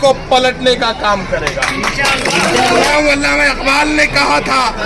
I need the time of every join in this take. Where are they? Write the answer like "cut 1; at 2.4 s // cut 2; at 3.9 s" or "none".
cut 1; at 2.9 s